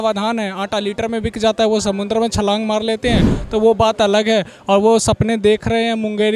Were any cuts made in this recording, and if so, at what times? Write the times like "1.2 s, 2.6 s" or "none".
none